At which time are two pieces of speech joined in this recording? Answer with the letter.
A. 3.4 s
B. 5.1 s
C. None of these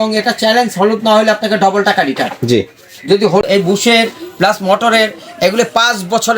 A